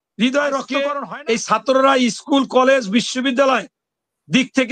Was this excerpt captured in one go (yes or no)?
no